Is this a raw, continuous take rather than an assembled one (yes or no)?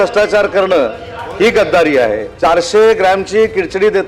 no